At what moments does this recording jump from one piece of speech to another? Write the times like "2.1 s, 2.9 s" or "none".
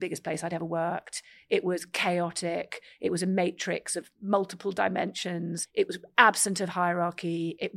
4.1 s, 5.6 s